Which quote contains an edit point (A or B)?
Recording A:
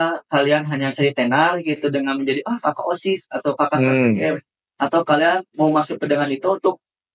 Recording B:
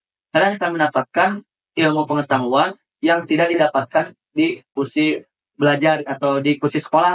B